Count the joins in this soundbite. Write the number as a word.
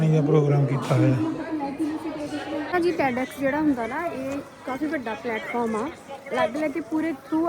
one